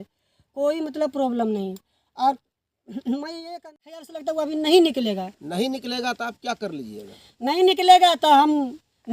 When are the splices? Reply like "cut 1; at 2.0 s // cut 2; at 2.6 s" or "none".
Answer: cut 1; at 4.1 s